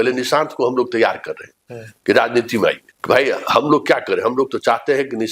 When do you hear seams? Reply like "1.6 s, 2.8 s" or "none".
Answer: 2.9 s